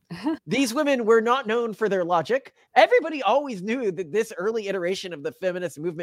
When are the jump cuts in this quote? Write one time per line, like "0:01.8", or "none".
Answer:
0:02.6